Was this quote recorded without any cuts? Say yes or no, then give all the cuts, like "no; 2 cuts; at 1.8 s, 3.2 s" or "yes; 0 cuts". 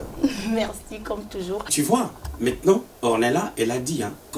no; 1 cut; at 1.7 s